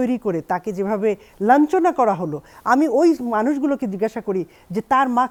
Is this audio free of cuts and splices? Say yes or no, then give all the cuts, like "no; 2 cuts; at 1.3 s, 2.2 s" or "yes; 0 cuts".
yes; 0 cuts